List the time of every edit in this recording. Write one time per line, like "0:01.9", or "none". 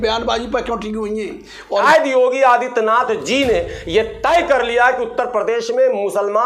0:01.8